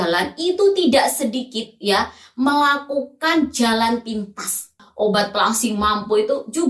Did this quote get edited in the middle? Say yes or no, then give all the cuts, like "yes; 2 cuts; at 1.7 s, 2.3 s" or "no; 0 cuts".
yes; 1 cut; at 4.8 s